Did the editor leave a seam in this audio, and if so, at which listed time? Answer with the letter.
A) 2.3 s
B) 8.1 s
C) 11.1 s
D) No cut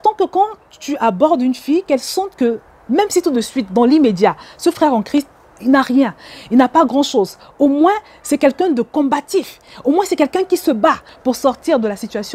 C